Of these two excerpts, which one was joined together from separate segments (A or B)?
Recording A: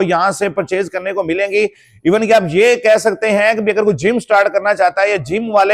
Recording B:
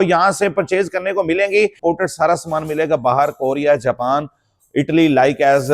B